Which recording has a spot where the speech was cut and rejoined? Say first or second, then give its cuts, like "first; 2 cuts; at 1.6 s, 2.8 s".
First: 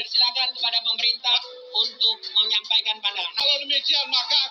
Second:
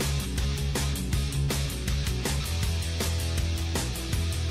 first; 1 cut; at 3.4 s